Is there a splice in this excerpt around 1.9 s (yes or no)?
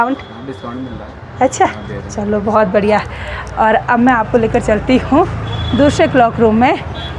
no